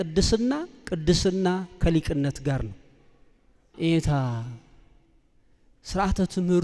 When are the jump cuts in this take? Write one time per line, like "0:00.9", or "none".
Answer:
0:03.7